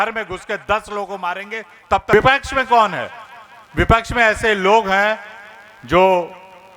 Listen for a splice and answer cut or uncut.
cut